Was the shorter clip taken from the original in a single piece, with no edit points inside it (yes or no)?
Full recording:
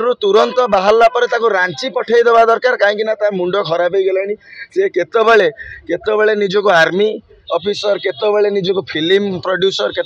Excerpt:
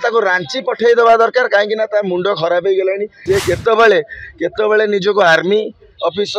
no